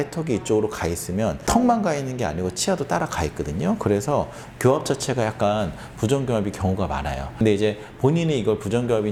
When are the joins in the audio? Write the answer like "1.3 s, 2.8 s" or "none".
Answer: none